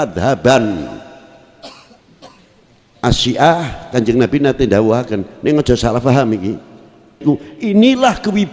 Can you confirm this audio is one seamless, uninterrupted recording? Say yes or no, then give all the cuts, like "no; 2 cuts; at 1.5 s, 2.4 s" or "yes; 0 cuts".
no; 1 cut; at 7.2 s